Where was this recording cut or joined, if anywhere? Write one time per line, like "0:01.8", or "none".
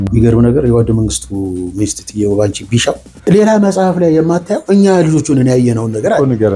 0:03.1